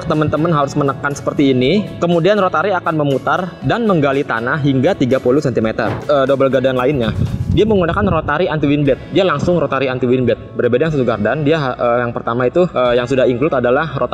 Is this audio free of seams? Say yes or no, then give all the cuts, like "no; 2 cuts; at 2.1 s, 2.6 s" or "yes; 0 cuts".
no; 1 cut; at 6.0 s